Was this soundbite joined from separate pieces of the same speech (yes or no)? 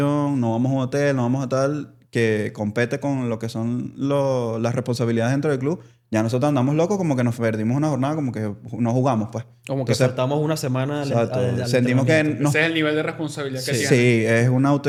no